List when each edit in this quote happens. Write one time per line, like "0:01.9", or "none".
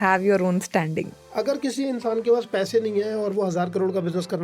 0:01.2